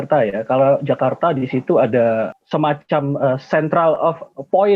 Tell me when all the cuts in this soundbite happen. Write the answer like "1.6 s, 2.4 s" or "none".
2.3 s